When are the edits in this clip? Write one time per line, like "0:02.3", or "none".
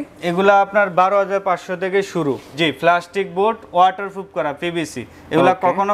0:02.5

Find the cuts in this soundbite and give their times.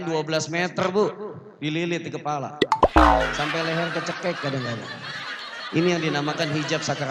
none

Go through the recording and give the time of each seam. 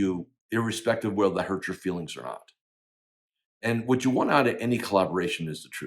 none

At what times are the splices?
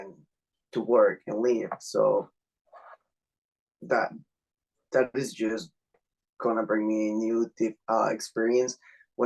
none

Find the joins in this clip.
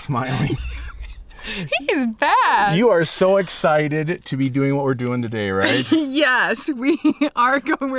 none

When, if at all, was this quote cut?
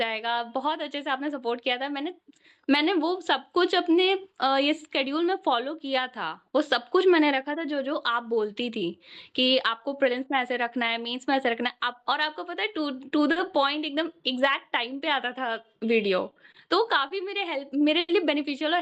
none

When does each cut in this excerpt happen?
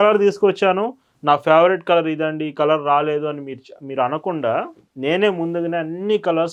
none

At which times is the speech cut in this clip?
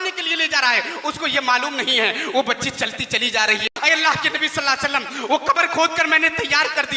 0:03.7

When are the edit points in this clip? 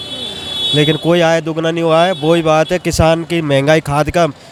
none

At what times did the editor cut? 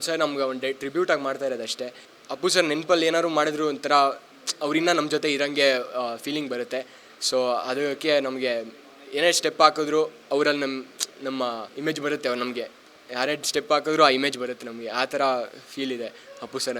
none

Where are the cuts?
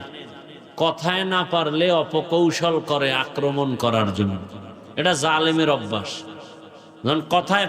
none

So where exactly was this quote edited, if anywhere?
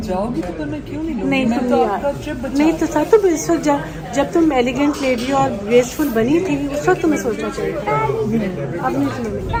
none

